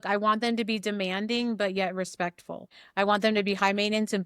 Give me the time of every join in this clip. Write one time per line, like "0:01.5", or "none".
0:02.7

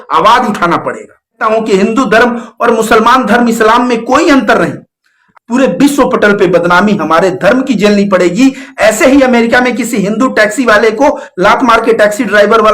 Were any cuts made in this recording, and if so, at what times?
0:01.4
0:05.3

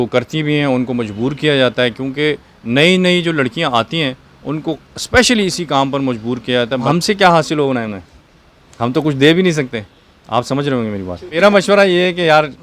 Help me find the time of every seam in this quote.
0:06.8
0:11.2

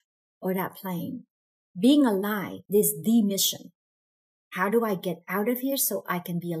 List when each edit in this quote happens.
0:02.5

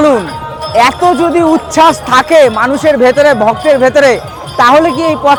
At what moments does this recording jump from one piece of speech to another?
none

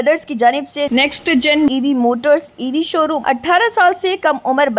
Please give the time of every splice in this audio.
0:03.2

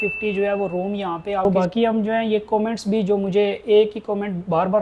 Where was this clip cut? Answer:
0:01.4

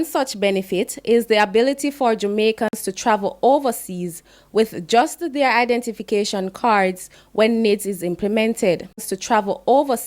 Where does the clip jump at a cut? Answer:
0:09.1

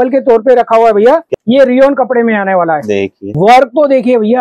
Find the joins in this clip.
0:01.3
0:03.2

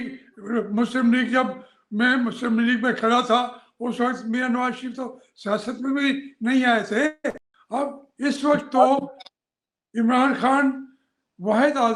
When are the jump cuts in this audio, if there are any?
0:07.5

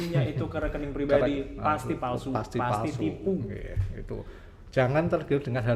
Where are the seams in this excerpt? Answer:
none

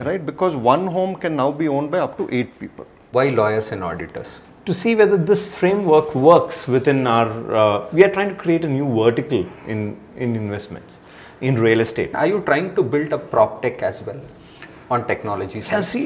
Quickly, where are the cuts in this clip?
0:03.1
0:12.1

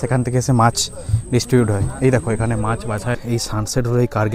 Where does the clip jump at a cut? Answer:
0:02.9

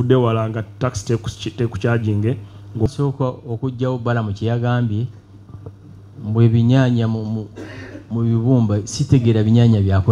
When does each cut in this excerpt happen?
0:02.9

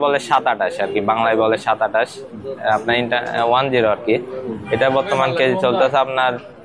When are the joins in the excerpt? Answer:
none

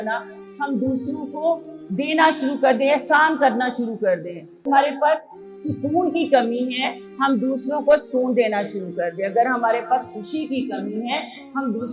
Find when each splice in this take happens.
0:01.8
0:04.7

